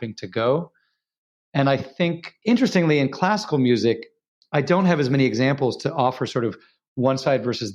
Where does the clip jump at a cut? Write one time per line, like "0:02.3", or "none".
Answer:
0:02.3